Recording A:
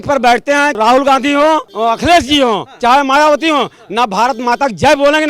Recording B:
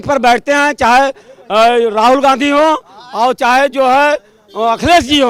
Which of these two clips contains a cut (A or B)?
A